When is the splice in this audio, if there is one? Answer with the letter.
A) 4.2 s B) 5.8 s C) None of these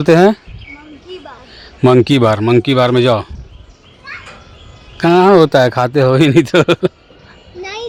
C